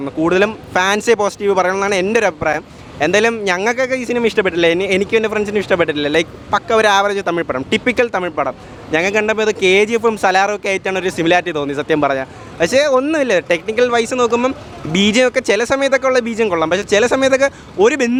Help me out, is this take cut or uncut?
uncut